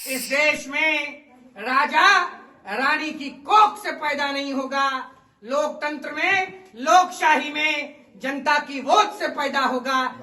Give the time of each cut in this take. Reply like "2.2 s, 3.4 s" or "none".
none